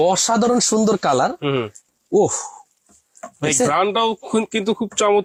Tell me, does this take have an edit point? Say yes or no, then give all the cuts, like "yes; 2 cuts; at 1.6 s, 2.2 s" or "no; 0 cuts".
no; 0 cuts